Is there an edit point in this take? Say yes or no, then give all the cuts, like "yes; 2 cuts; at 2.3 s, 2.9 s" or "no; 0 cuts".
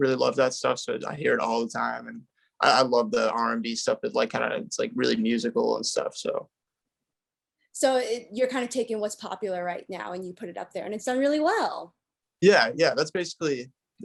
no; 0 cuts